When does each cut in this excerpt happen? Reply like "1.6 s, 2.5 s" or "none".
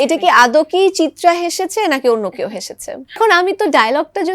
3.2 s